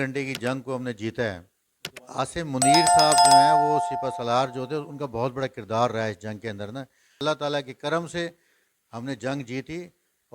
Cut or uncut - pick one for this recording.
cut